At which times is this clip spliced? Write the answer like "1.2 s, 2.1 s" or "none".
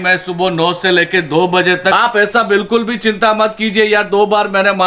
1.9 s

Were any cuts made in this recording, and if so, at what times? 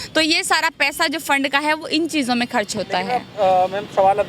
none

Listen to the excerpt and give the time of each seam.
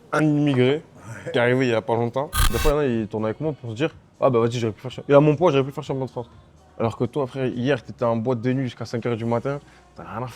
2.5 s

